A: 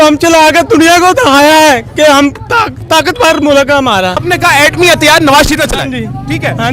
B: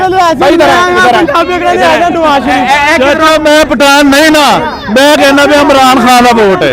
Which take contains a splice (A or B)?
A